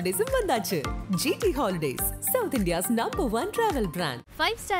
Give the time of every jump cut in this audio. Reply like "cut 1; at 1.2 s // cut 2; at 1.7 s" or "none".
none